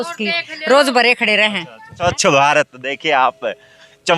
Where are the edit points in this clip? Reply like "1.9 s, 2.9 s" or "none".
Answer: 2.0 s